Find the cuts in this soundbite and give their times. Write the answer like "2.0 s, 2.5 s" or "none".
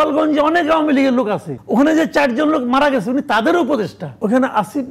1.5 s, 4.2 s